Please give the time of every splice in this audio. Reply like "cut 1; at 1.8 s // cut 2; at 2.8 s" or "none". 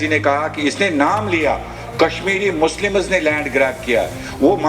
none